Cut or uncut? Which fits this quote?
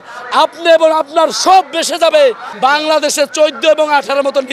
cut